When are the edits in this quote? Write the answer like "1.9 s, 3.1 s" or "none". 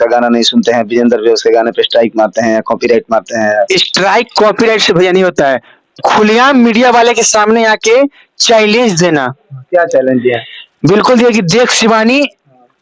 none